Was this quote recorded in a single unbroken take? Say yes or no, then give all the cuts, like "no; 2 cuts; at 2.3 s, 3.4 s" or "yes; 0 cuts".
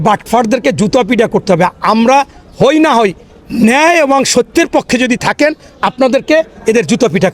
yes; 0 cuts